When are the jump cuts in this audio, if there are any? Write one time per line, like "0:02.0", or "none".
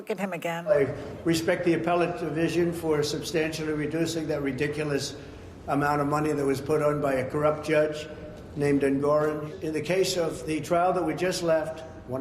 0:01.0